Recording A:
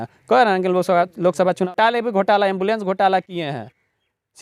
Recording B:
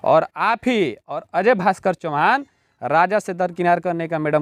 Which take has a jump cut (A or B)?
A